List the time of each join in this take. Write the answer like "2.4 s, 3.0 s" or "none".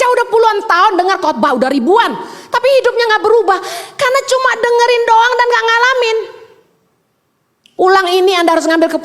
none